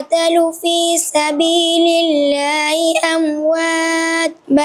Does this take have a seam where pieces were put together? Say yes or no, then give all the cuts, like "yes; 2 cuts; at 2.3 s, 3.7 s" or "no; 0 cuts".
no; 0 cuts